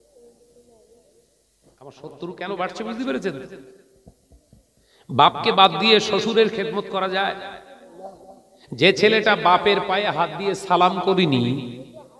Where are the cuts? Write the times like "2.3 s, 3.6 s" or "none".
2.0 s